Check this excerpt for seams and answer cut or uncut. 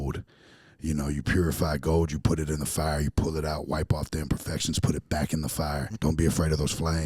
cut